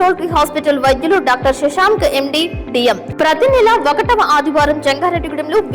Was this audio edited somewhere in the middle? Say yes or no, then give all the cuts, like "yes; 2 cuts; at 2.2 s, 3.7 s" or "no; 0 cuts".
yes; 1 cut; at 3.1 s